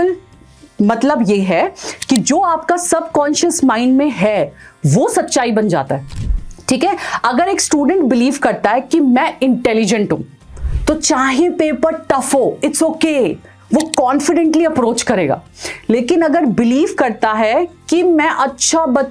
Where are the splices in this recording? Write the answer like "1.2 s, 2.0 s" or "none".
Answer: none